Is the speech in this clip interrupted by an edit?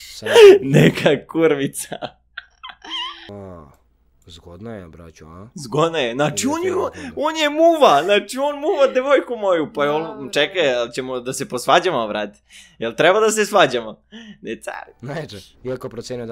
yes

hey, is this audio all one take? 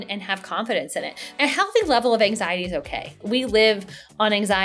no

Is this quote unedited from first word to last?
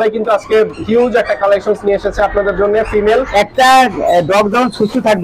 no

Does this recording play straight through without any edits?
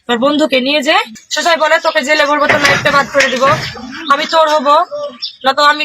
no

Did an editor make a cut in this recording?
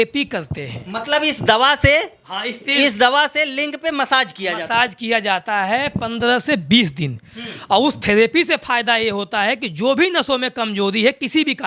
no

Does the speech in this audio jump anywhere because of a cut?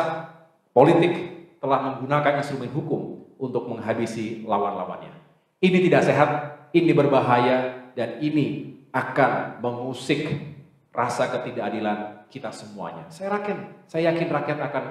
no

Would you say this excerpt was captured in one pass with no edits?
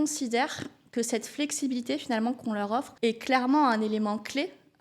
no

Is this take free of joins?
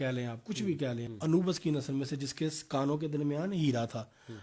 no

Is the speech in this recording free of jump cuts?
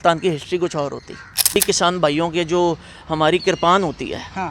no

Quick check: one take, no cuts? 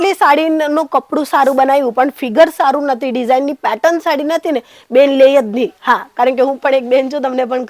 yes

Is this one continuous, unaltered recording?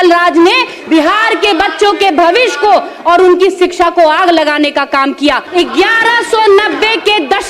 no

